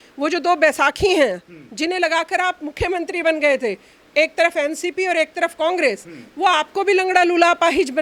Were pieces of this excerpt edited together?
no; 0 cuts

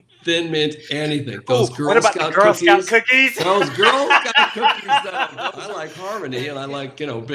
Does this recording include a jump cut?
yes; 1 cut; at 5.7 s

